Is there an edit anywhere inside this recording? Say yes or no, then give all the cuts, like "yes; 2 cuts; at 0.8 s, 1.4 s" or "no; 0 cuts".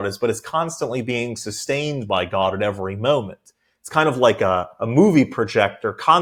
no; 0 cuts